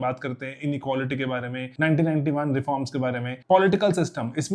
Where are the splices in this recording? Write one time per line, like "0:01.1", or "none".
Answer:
0:01.6
0:03.3